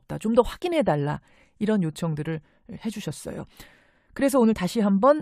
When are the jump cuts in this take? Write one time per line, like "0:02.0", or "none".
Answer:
0:01.5